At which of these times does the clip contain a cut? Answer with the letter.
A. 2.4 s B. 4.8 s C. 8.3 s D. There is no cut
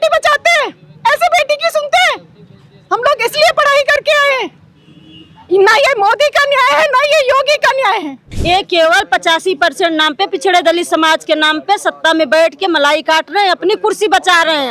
C